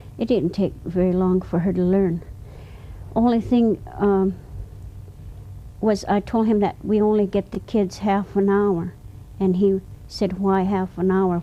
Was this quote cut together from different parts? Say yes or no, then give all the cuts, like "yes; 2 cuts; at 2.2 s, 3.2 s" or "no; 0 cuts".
no; 0 cuts